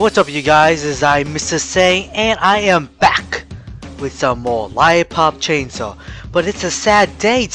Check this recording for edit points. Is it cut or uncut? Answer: uncut